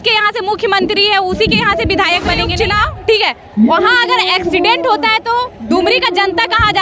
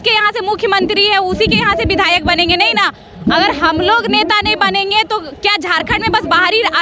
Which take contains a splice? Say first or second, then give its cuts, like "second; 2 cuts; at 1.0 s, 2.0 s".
first; 1 cut; at 2.5 s